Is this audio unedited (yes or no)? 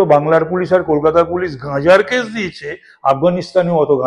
yes